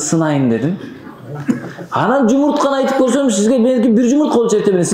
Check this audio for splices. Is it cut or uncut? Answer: uncut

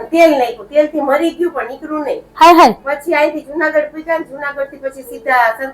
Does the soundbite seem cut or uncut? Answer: uncut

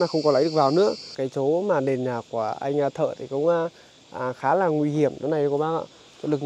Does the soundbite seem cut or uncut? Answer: cut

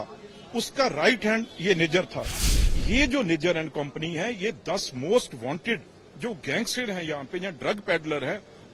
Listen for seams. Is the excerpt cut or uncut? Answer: cut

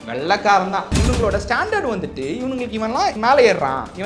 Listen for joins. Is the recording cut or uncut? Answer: cut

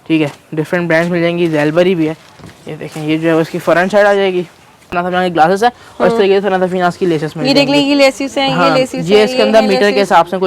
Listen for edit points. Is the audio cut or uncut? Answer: cut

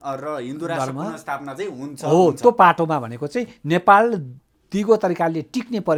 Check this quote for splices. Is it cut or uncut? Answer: uncut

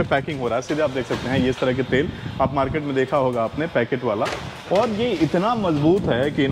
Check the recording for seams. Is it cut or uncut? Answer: uncut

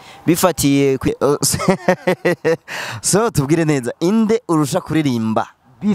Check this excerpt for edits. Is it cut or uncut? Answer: cut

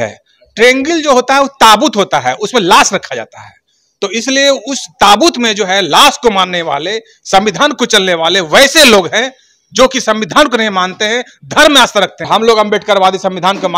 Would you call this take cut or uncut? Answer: cut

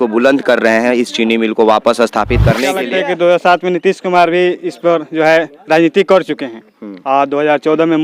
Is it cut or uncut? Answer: cut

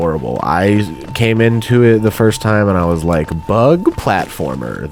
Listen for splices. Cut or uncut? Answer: uncut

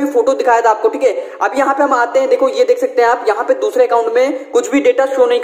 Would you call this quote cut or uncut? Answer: uncut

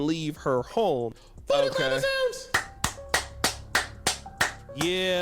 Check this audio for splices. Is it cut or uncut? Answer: cut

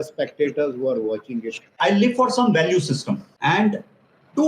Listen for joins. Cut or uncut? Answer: cut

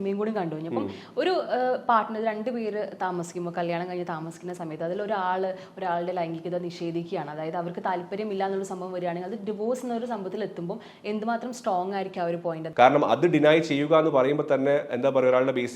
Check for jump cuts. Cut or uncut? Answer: cut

